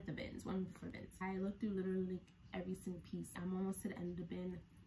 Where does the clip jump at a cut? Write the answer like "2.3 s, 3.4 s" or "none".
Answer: 1.1 s, 3.4 s